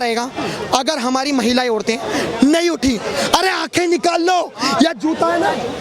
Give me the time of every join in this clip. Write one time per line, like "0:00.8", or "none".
none